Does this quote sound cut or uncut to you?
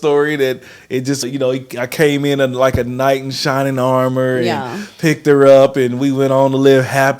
cut